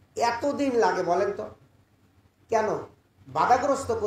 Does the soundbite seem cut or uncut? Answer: uncut